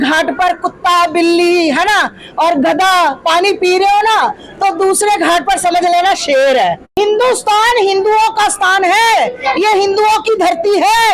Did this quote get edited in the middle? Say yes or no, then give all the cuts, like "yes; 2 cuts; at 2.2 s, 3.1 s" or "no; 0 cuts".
yes; 1 cut; at 6.9 s